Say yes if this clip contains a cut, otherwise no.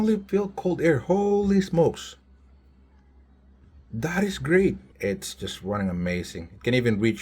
yes